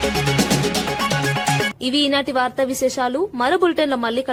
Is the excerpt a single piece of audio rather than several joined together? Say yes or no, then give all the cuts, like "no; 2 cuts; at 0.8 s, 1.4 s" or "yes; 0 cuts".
yes; 0 cuts